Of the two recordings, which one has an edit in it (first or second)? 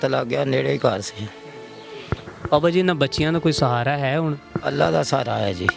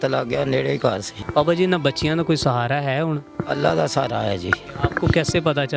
second